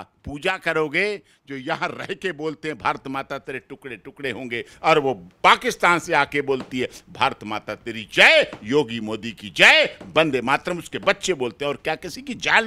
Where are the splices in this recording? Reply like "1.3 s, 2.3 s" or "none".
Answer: none